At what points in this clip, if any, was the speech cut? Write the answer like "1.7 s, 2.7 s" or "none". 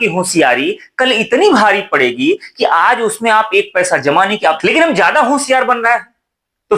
4.6 s